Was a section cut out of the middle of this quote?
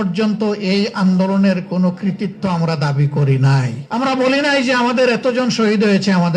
yes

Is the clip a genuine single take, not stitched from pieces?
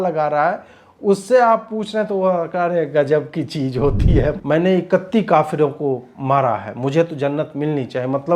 no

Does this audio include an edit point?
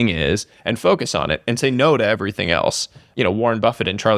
yes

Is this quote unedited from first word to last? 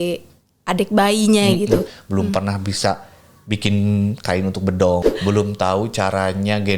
no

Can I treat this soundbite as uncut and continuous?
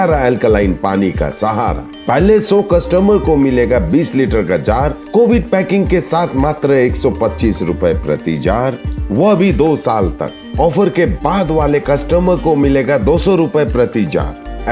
yes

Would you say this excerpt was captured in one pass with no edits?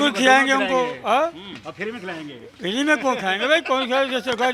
yes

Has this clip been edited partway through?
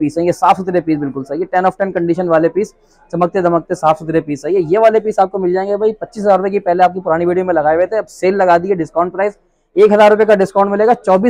no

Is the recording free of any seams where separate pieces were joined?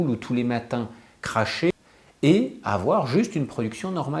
no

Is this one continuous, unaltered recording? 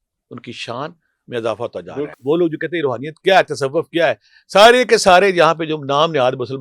no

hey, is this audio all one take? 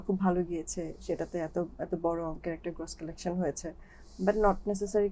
yes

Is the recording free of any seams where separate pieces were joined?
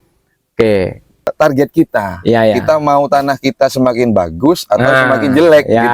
no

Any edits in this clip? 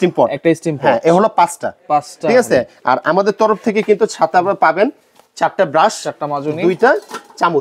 no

